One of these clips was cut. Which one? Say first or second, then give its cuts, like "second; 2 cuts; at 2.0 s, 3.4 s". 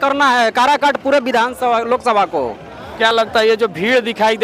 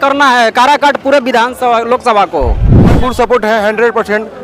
second; 1 cut; at 3.0 s